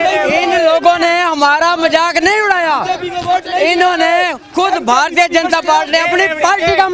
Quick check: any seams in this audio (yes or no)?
no